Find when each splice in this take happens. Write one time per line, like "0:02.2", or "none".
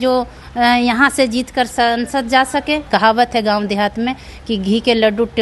0:02.8